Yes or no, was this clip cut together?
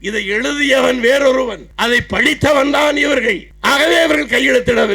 yes